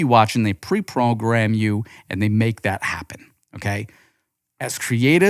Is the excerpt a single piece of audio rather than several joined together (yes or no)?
yes